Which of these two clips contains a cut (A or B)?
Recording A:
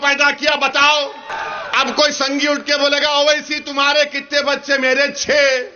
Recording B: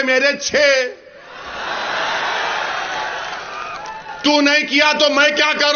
A